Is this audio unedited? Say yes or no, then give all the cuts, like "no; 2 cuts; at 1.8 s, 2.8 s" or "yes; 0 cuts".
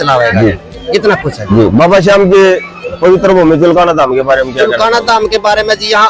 yes; 0 cuts